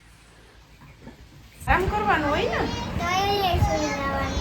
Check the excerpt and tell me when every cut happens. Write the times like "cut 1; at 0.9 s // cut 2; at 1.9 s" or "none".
cut 1; at 1.7 s